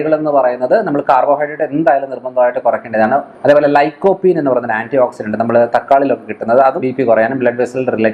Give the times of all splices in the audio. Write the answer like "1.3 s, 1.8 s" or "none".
3.3 s, 6.8 s

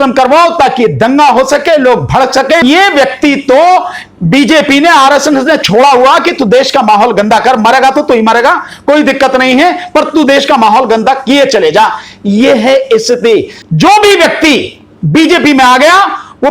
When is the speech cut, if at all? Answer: 2.6 s, 13.6 s

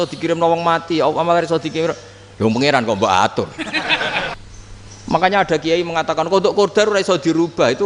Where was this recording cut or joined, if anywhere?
4.4 s

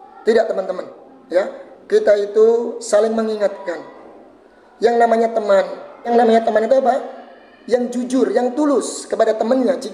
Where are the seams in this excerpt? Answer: 6.1 s

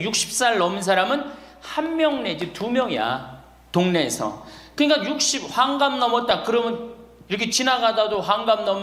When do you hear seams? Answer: none

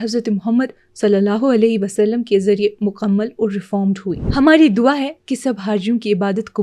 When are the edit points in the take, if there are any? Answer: 4.1 s

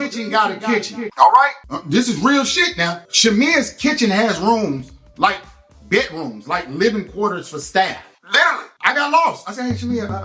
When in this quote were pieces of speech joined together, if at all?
none

